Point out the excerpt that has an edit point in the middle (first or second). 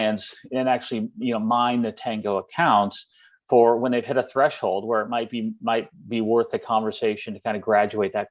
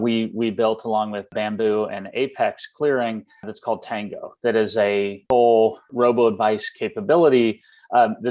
second